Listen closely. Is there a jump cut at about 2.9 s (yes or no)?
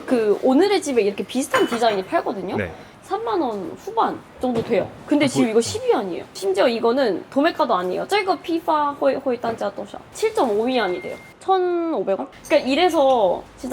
yes